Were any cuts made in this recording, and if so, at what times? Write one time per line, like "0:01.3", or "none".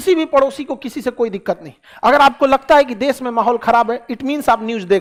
none